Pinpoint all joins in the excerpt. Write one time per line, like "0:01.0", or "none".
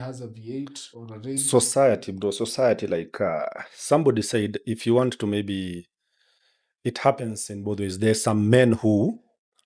none